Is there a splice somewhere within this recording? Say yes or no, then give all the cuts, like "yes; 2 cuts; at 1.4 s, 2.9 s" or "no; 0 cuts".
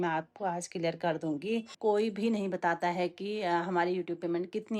yes; 1 cut; at 1.7 s